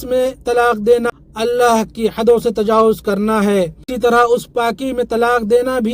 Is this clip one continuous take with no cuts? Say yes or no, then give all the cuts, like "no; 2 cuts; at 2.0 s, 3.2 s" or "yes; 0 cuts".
no; 2 cuts; at 1.2 s, 3.9 s